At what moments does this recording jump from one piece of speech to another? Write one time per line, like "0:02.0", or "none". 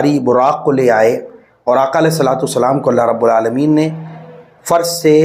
none